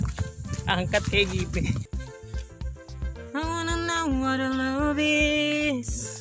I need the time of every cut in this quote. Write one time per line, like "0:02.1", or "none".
0:01.9